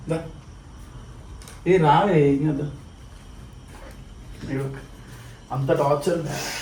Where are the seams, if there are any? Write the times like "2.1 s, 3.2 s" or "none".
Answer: none